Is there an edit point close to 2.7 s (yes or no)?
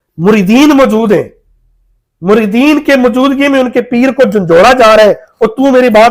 no